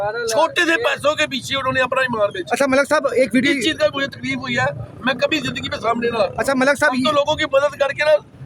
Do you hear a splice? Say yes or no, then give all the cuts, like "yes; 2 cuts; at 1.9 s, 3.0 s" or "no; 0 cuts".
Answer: no; 0 cuts